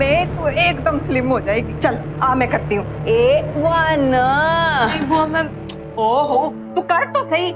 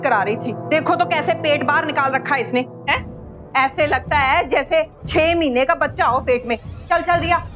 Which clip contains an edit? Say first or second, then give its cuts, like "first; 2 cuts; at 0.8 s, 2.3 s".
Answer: first; 1 cut; at 1.7 s